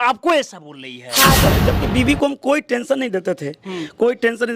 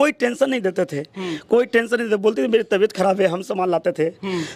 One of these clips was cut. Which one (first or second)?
first